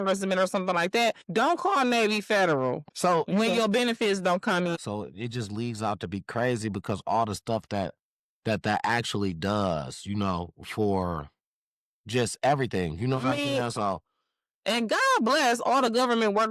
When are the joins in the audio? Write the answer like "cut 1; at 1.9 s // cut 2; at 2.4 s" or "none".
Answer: cut 1; at 1.2 s // cut 2; at 2.8 s // cut 3; at 4.8 s